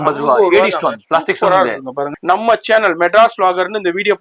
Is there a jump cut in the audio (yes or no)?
yes